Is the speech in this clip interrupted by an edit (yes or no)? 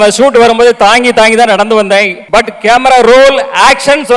yes